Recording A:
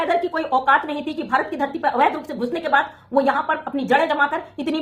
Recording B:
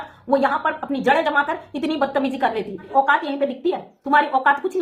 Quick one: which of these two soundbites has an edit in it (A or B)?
B